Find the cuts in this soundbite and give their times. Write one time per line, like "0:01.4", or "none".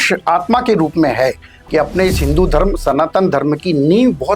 0:01.5